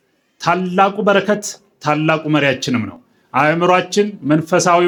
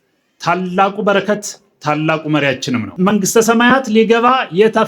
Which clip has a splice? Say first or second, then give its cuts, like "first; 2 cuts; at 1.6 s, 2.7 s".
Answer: second; 1 cut; at 2.9 s